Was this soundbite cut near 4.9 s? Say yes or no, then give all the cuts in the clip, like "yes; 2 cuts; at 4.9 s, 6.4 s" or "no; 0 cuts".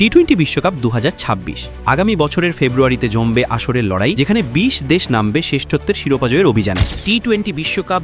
no; 1 cut; at 6.9 s